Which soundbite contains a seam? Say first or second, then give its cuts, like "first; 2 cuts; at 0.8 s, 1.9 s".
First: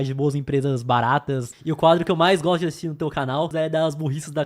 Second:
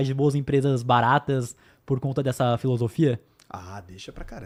first; 2 cuts; at 1.5 s, 3.5 s